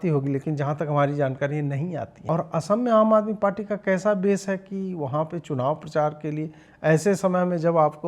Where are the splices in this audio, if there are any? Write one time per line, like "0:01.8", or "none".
0:02.1